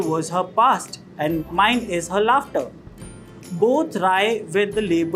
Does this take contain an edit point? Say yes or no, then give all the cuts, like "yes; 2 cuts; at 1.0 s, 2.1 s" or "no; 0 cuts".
yes; 1 cut; at 1.4 s